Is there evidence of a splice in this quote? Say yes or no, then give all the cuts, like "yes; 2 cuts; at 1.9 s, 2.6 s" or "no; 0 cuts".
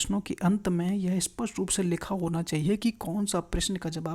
no; 0 cuts